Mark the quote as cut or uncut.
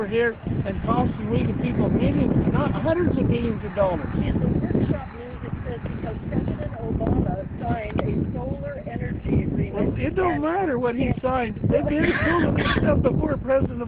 uncut